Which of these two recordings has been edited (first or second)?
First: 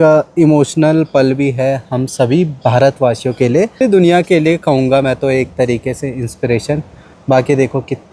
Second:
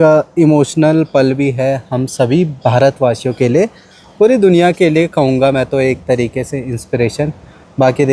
first